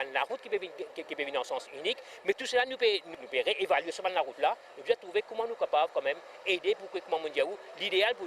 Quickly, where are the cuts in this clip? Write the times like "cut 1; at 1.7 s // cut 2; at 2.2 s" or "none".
none